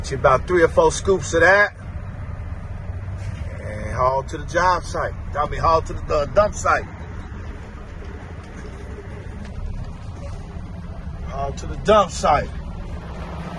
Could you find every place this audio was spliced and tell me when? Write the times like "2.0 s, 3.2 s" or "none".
none